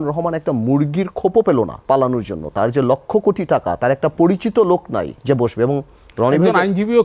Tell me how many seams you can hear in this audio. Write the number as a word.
two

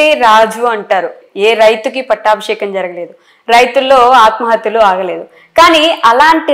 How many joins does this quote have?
one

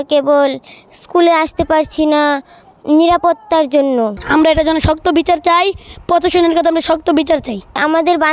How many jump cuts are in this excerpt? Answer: one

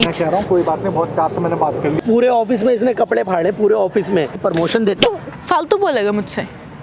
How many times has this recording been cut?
two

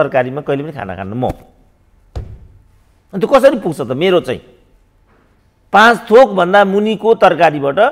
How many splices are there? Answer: zero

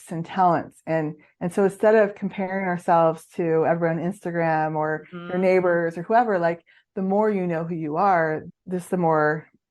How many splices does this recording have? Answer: one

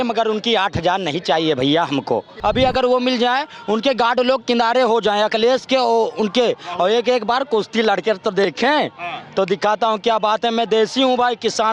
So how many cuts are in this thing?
one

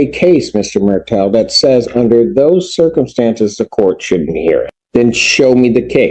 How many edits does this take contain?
one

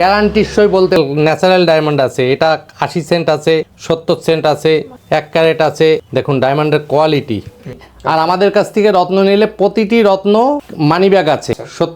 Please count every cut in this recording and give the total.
five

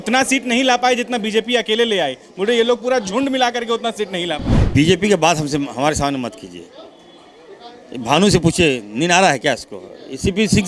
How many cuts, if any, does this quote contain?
one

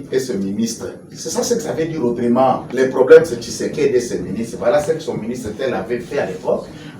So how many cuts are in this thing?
zero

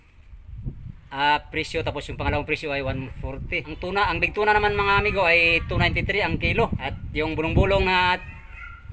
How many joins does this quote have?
two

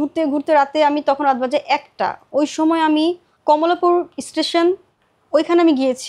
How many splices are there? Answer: one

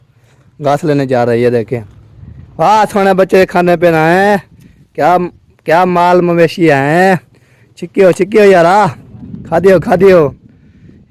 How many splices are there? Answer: zero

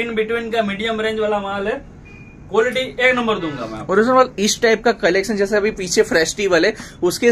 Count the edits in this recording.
zero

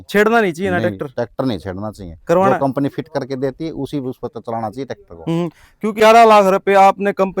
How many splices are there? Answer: one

